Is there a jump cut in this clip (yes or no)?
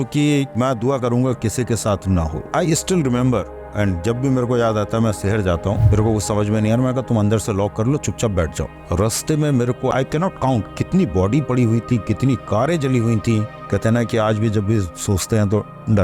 yes